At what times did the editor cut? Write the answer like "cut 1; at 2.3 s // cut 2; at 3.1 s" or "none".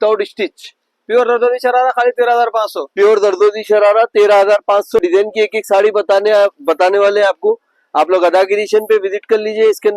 cut 1; at 5.0 s